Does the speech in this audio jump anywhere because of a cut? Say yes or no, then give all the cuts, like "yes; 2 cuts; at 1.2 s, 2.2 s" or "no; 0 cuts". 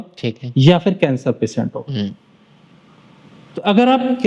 no; 0 cuts